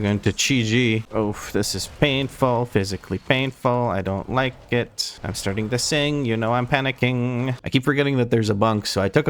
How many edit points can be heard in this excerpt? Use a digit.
2